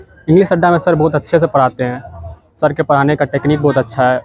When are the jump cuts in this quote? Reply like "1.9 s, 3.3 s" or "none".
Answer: none